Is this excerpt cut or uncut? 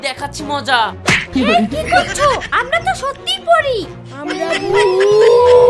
uncut